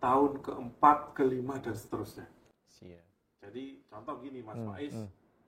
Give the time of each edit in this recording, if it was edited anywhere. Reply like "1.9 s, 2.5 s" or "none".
none

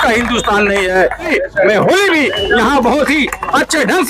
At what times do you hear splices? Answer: 1.3 s

